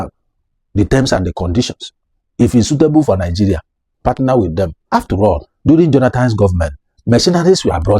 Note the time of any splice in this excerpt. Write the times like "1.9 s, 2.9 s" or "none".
5.0 s